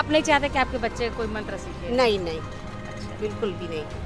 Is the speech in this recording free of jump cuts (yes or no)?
yes